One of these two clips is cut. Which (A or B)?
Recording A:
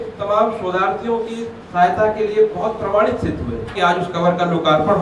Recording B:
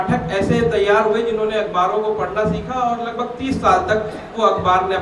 A